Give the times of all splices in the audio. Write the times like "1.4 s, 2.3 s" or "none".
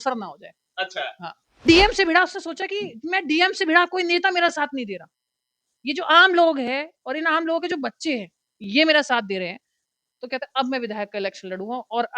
1.6 s